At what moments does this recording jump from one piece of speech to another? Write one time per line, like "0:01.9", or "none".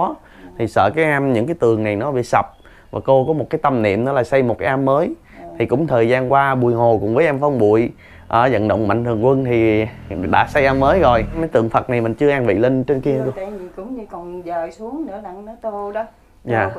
none

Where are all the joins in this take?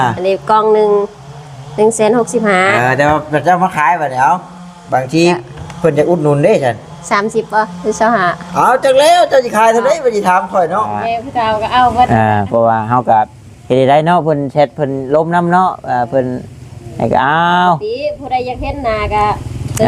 0:11.0

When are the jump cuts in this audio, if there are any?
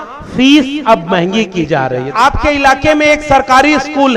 0:02.1

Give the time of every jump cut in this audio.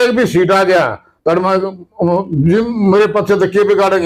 none

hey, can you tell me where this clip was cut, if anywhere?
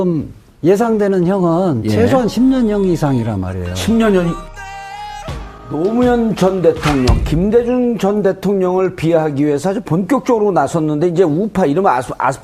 0:04.3

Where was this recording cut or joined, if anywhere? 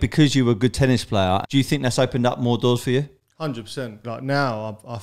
0:01.4
0:04.0

